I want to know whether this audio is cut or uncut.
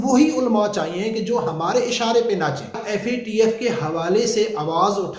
cut